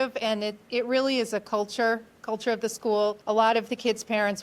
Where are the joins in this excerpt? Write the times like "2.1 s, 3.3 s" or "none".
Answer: 3.2 s